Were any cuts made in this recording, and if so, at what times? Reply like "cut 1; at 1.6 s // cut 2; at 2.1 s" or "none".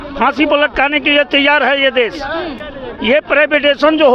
none